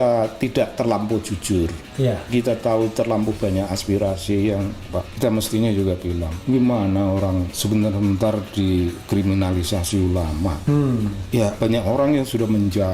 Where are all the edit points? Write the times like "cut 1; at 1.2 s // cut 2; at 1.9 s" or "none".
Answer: cut 1; at 5.1 s // cut 2; at 6.3 s // cut 3; at 7.5 s // cut 4; at 10.6 s // cut 5; at 11.4 s